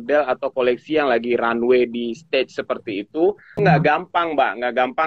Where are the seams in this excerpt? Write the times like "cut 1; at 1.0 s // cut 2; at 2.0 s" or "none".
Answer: cut 1; at 3.5 s